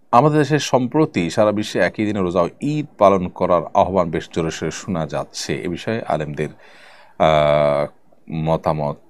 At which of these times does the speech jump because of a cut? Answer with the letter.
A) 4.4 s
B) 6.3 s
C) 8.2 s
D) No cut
D